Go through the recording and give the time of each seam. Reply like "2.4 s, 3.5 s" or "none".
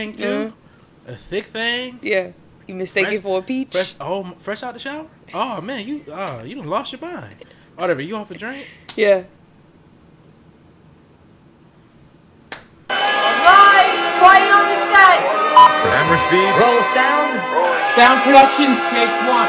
12.7 s